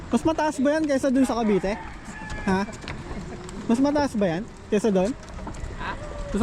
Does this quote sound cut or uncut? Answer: uncut